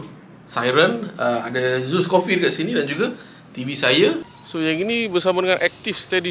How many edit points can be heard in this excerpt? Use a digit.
1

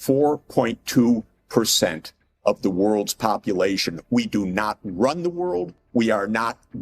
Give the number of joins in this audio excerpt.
1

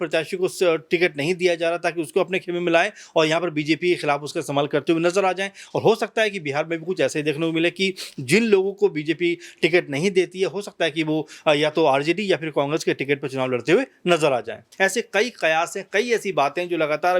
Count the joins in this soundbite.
1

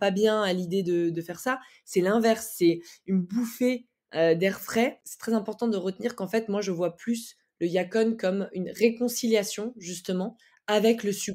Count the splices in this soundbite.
1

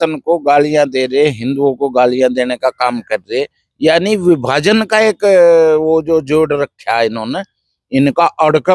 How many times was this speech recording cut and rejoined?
0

